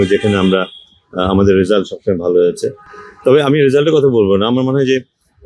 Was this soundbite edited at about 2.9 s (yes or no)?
no